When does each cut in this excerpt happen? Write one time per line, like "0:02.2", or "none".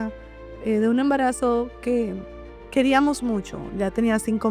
none